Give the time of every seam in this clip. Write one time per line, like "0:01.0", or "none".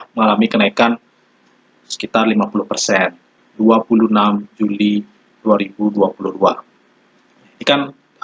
0:03.4